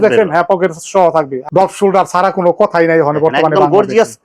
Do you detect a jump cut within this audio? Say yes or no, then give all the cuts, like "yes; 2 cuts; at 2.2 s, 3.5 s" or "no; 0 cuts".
yes; 1 cut; at 1.4 s